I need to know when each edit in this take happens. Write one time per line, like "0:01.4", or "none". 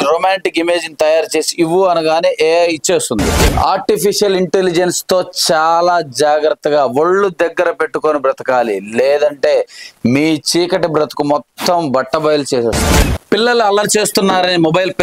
0:03.5
0:12.8

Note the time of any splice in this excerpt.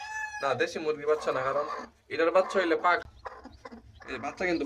0:03.0

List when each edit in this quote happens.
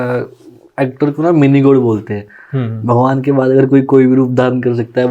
none

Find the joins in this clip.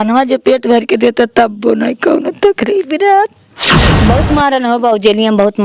0:03.9

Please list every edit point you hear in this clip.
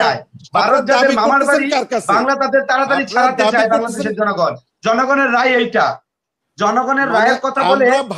none

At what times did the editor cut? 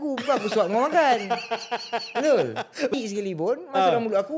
0:02.9

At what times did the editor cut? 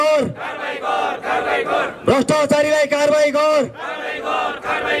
none

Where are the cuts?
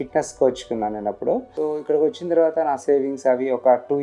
0:01.5

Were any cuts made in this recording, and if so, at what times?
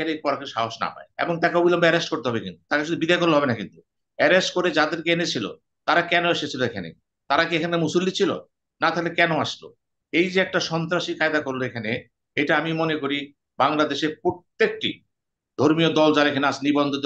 0:01.0

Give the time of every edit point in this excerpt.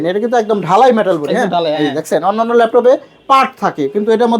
none

